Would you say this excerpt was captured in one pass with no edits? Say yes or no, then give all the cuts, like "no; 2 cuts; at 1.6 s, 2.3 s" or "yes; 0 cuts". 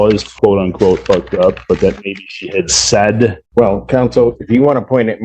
no; 1 cut; at 3.4 s